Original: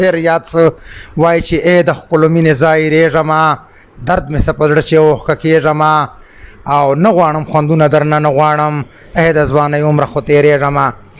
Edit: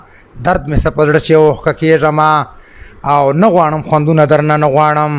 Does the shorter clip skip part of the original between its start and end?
no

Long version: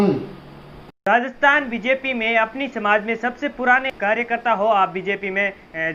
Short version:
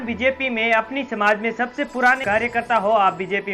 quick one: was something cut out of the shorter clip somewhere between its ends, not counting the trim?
yes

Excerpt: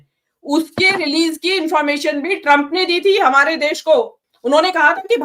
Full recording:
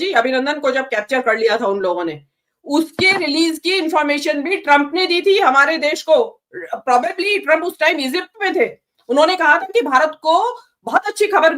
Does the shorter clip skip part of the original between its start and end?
yes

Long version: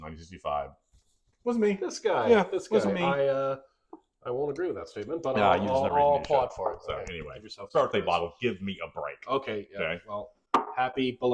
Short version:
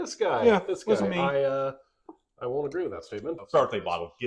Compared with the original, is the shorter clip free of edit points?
no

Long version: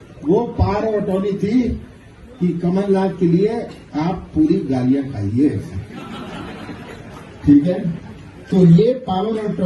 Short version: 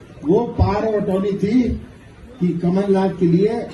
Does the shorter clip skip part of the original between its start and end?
no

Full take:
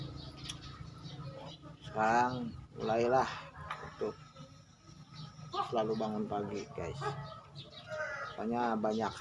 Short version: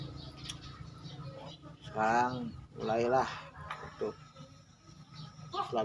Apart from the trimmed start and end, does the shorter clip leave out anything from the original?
no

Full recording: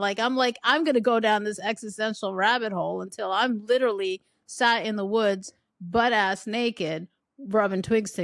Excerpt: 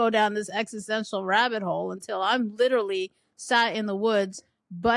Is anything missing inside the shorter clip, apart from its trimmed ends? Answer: no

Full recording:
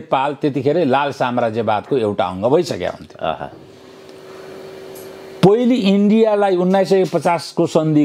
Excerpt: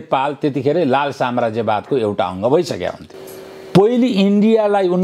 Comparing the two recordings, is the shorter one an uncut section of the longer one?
no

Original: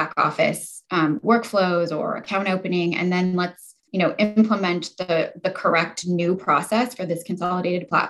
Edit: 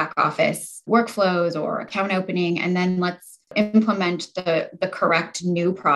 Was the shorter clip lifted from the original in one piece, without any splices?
no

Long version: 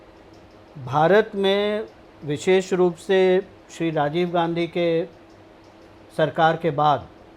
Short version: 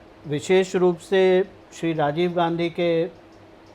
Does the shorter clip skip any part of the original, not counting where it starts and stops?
no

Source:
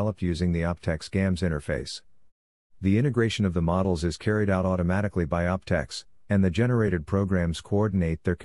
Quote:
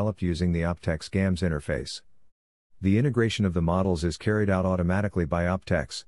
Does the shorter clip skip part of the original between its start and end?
no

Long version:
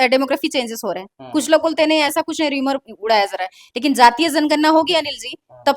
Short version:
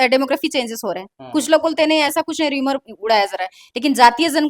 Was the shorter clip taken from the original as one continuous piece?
yes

